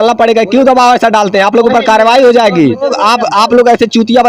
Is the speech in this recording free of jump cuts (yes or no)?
no